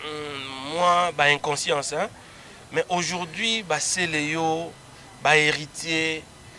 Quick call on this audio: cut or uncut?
uncut